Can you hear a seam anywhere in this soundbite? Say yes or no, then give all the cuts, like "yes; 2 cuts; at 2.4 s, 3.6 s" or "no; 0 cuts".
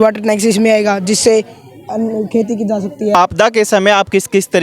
yes; 1 cut; at 3.2 s